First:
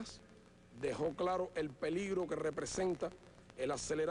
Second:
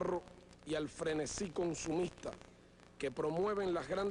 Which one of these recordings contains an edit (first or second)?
first